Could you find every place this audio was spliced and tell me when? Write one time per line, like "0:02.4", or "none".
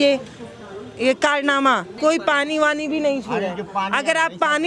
0:01.9

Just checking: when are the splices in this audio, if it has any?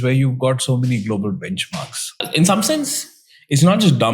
0:02.2

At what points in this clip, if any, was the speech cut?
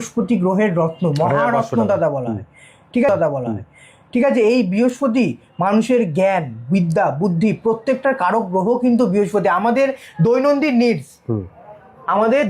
none

